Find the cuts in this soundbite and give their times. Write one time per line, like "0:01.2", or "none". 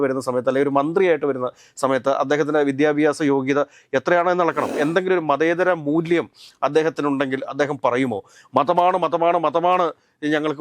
0:04.7